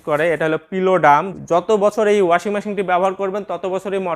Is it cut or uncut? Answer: cut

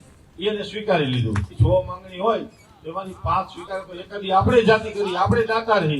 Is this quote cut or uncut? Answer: cut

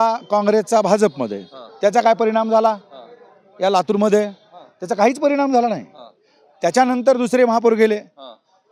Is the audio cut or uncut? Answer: uncut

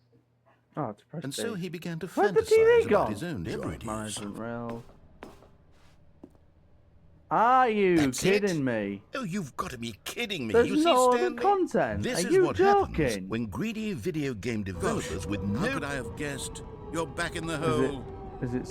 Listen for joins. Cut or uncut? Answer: cut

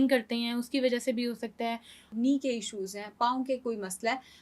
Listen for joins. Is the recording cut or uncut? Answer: cut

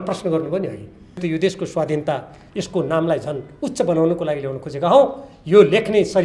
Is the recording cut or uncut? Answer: cut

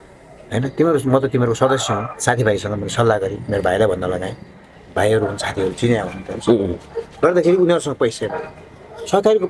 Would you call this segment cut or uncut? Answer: cut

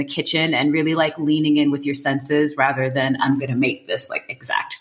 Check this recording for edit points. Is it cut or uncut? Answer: uncut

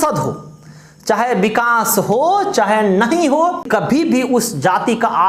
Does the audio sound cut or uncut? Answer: cut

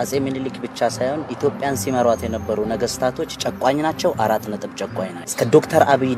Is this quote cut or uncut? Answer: cut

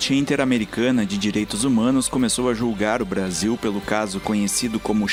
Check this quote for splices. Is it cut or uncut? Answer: uncut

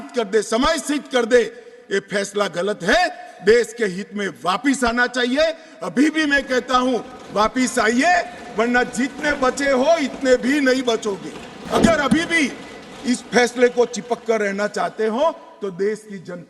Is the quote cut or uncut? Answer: cut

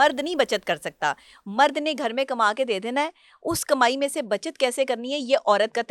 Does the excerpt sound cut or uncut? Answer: uncut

